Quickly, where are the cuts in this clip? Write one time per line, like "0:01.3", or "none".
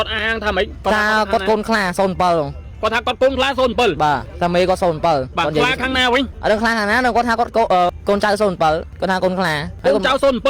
0:04.3
0:05.3
0:06.3
0:07.9
0:09.2